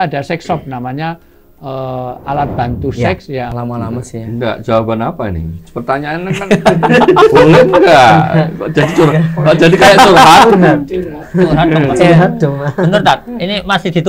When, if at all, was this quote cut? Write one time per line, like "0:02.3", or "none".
0:03.5